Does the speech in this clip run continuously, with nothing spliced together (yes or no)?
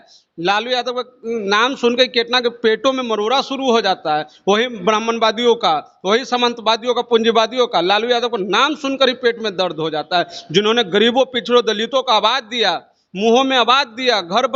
yes